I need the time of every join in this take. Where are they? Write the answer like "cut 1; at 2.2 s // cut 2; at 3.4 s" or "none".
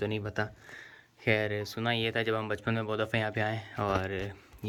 none